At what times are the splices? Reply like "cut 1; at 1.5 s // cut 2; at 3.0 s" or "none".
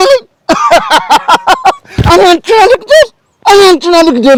none